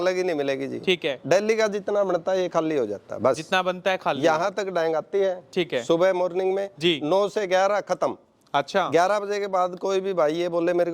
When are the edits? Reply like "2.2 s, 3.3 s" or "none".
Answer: none